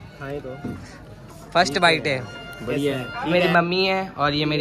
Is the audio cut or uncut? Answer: cut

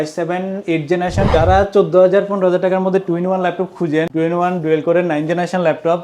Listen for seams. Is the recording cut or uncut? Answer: cut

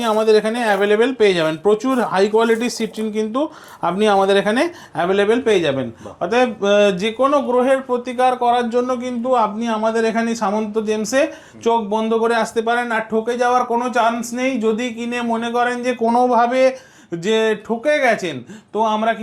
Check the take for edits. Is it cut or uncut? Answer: uncut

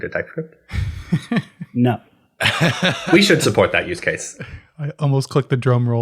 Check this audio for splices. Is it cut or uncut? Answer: uncut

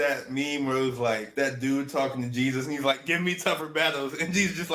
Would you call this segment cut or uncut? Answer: cut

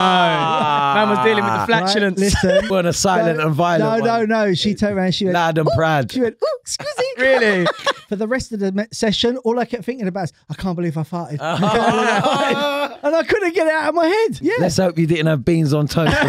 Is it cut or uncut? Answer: cut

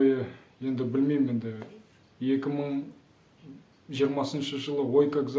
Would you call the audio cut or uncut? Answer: uncut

